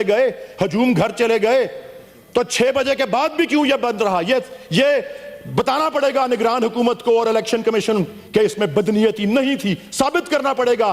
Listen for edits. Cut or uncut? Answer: uncut